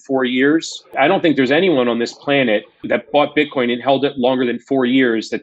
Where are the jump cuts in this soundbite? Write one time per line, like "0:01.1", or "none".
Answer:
0:00.9
0:02.8